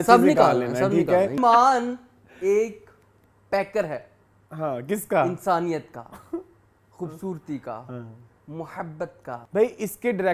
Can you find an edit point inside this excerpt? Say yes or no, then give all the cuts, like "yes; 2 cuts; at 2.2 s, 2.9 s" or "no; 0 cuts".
yes; 2 cuts; at 1.4 s, 9.4 s